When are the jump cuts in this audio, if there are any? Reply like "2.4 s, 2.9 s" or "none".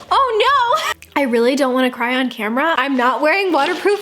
0.9 s, 2.8 s